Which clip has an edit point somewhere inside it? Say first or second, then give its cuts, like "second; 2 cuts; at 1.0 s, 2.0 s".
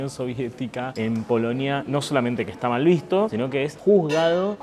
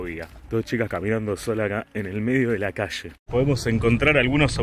second; 1 cut; at 3.2 s